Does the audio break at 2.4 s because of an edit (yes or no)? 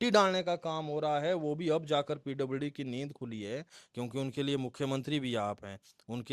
no